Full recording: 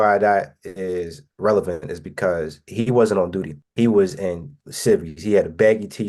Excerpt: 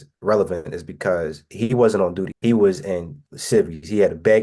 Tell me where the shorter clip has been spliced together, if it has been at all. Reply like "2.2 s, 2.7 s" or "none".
2.3 s